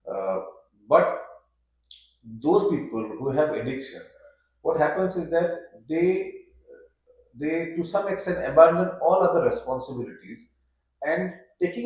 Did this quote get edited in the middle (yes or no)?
no